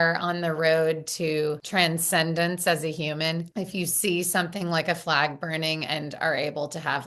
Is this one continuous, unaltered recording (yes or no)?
no